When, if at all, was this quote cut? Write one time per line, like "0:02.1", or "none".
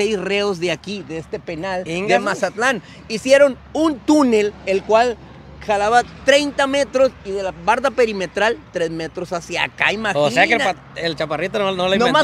none